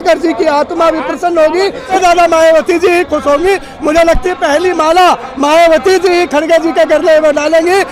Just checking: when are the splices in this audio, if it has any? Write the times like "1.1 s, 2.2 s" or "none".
1.9 s